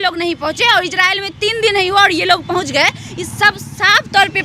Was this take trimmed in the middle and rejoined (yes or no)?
no